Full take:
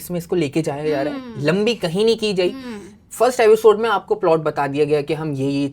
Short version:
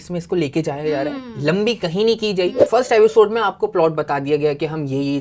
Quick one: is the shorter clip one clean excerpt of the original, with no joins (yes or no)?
no